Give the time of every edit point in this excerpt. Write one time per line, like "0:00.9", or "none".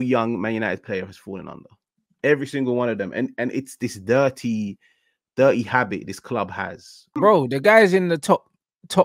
0:07.1